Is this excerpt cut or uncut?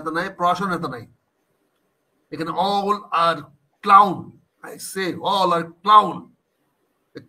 uncut